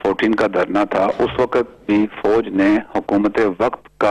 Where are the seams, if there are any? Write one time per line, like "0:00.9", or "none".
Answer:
none